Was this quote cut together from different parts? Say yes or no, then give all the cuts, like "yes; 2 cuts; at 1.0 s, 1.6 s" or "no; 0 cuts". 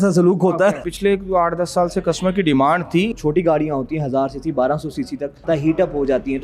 yes; 3 cuts; at 0.8 s, 3.1 s, 5.4 s